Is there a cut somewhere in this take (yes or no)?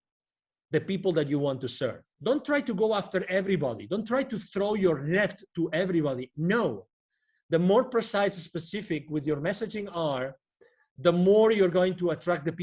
yes